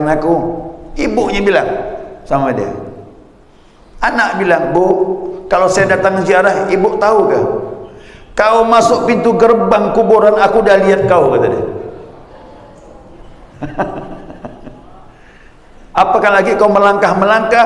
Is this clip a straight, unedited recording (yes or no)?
yes